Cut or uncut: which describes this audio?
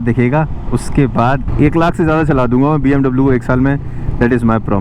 cut